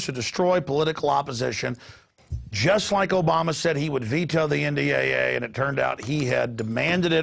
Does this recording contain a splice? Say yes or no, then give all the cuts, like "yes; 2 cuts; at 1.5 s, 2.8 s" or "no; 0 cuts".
no; 0 cuts